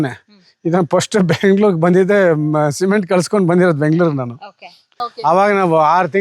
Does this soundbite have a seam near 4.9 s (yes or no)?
yes